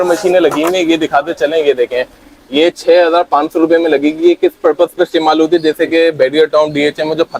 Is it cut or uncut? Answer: uncut